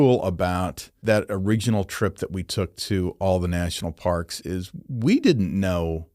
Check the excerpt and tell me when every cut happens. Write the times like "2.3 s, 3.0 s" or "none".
1.0 s